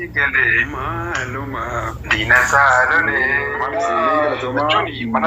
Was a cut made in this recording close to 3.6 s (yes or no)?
yes